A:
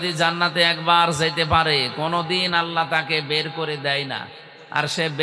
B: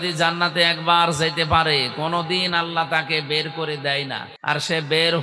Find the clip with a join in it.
B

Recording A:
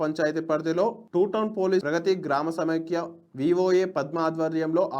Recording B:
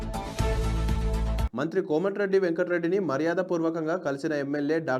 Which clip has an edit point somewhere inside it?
B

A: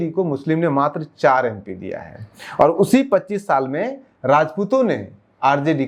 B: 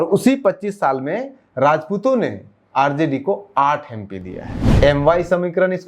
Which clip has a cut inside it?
B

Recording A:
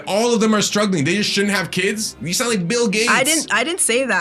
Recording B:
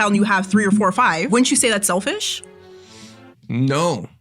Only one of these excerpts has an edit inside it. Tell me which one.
B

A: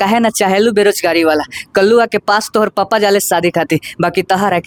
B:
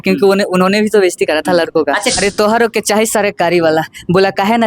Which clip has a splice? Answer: B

